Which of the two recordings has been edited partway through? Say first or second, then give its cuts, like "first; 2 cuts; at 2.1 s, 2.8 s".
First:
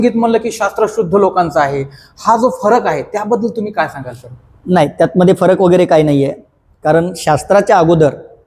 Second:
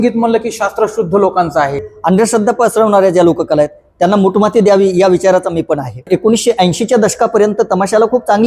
second; 2 cuts; at 1.9 s, 6.1 s